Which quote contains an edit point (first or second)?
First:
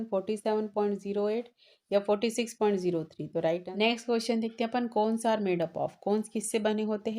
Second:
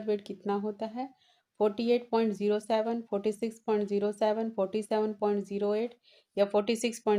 first